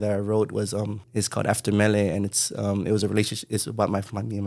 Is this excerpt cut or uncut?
cut